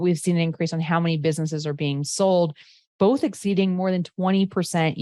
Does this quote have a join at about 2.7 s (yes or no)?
no